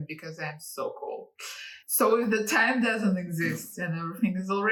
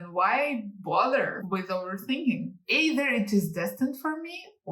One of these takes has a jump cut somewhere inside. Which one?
second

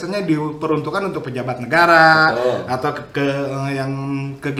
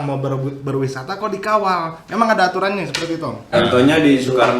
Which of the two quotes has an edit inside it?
second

